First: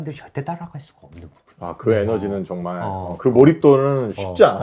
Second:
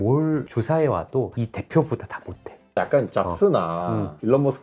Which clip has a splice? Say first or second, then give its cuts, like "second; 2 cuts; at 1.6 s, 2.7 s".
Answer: second; 2 cuts; at 1.3 s, 2.6 s